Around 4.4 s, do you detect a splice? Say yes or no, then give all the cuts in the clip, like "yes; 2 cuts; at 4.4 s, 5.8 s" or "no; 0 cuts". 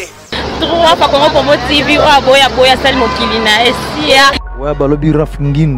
yes; 1 cut; at 4.4 s